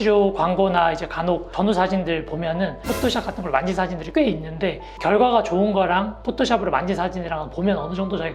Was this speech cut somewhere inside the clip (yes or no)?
no